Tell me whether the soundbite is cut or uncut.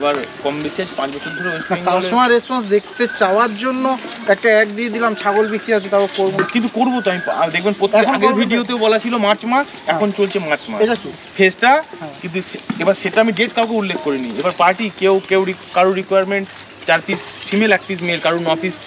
uncut